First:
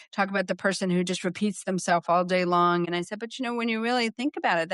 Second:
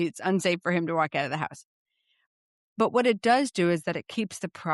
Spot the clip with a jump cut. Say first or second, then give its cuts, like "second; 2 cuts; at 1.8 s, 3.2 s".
first; 1 cut; at 2.9 s